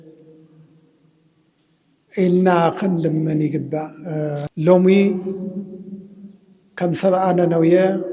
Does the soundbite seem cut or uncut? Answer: cut